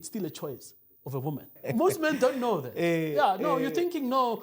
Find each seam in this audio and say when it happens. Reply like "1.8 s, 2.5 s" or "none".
1.6 s